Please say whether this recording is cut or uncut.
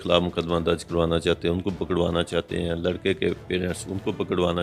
uncut